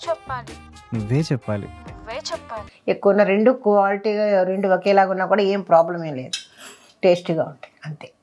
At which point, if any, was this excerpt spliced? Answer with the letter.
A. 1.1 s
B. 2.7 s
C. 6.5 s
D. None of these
B